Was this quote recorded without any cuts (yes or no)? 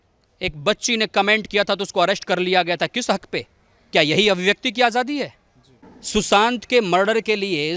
yes